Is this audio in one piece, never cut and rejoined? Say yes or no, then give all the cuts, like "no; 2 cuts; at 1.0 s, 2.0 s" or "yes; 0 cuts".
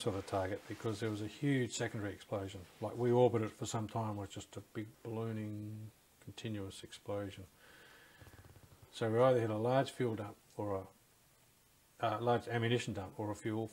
yes; 0 cuts